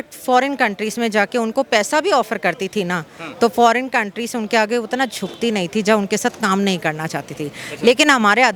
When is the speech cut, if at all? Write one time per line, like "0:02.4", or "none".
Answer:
none